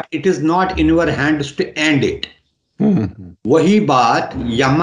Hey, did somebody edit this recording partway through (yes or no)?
no